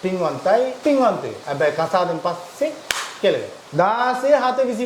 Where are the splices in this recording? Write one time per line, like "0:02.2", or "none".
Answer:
0:00.8
0:01.4
0:03.6